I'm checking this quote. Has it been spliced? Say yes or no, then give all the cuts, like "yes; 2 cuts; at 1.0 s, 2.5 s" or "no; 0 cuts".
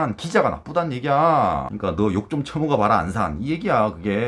yes; 1 cut; at 1.7 s